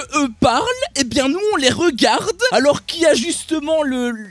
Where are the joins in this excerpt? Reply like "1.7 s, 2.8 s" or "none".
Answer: 2.4 s